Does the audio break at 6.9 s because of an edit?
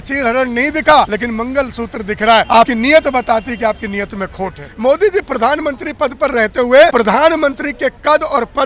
yes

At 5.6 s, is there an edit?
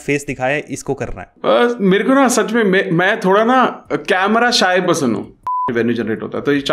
yes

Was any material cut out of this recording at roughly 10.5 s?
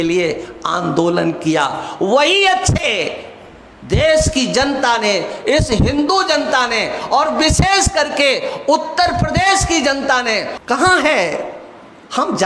yes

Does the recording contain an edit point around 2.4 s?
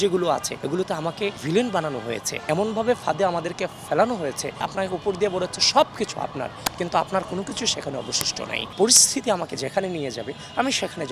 yes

